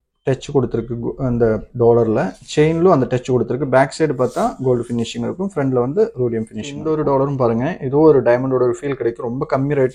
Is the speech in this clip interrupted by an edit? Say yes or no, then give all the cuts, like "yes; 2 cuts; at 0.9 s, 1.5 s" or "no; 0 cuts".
yes; 1 cut; at 6.7 s